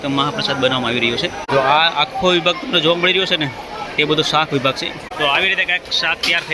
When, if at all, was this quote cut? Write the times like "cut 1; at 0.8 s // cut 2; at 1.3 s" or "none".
cut 1; at 1.5 s // cut 2; at 5.1 s

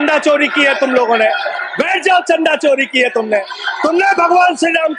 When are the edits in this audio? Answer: none

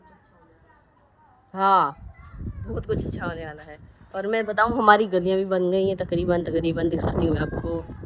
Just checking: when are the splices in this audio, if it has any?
none

